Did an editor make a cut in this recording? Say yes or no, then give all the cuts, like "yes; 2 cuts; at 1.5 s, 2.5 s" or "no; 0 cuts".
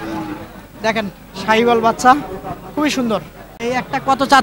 yes; 1 cut; at 3.5 s